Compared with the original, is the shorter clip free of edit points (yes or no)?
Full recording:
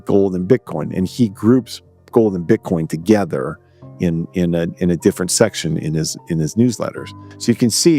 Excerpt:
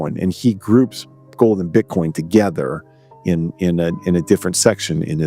yes